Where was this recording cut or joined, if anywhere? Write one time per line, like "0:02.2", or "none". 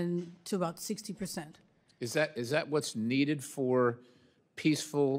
0:03.8